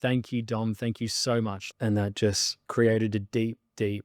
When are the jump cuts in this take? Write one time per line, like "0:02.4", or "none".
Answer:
0:01.6
0:02.5